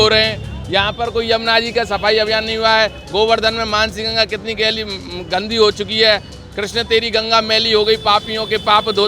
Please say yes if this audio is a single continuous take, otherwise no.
yes